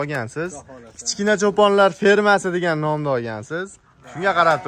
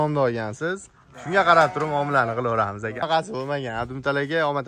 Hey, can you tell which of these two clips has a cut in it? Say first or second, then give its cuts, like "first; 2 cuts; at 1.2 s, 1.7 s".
second; 1 cut; at 3.0 s